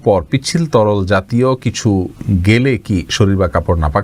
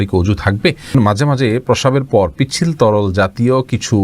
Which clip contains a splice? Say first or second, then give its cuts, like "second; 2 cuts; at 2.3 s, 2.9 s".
second; 1 cut; at 0.9 s